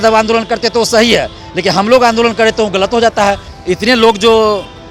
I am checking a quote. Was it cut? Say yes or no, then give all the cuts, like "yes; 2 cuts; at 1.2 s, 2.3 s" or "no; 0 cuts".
yes; 1 cut; at 3.5 s